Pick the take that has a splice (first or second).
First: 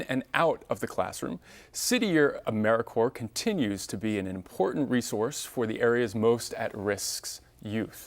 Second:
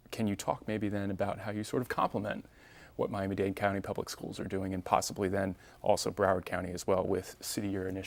first